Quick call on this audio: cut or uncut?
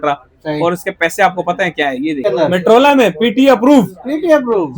cut